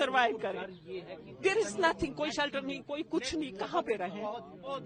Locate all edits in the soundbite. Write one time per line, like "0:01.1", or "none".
none